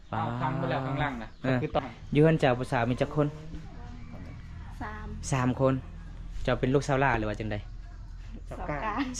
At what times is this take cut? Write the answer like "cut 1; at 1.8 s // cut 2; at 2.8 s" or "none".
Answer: cut 1; at 1.8 s